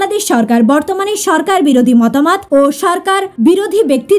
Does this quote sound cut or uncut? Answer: cut